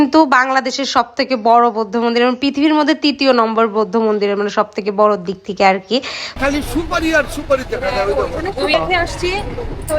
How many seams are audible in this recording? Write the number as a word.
two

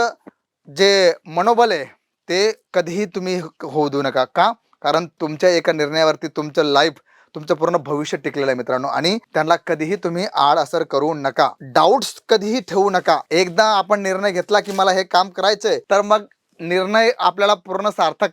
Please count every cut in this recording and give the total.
one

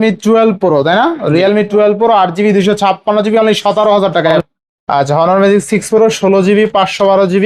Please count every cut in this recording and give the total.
one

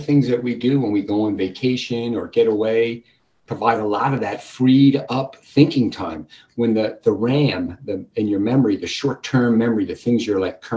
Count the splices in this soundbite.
zero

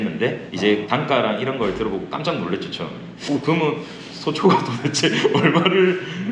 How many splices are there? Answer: two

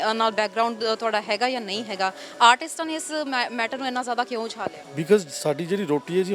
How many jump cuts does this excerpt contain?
one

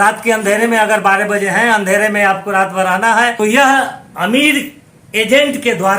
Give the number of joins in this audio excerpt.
one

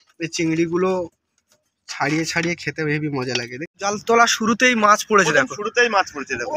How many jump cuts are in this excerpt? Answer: one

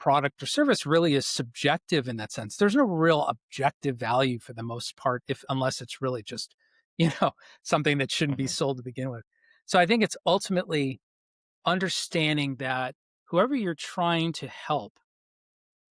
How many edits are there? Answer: zero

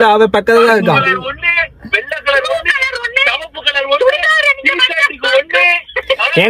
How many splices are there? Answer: zero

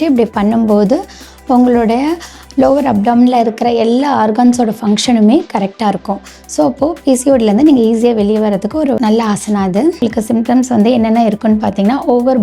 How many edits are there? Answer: one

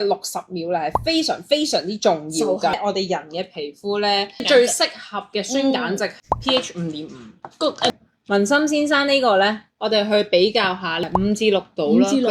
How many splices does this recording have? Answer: two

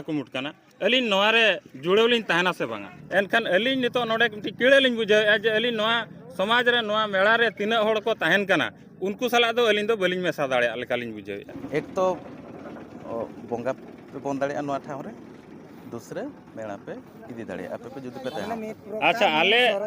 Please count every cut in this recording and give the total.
two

